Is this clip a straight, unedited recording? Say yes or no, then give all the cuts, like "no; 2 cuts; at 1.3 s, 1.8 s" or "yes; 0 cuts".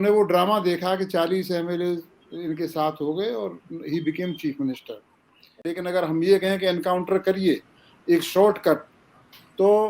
no; 1 cut; at 5.7 s